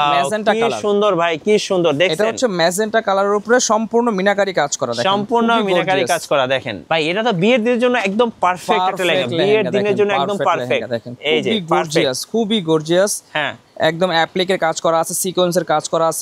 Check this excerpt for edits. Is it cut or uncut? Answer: cut